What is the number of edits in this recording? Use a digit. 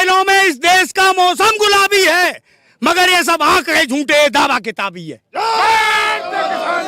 0